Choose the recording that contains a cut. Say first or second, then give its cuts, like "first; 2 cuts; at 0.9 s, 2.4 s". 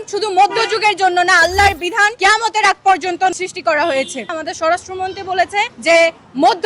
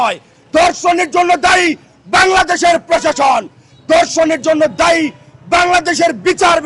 first; 4 cuts; at 2.1 s, 3.3 s, 4.3 s, 5.7 s